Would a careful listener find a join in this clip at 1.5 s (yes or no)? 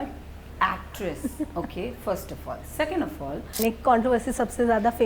no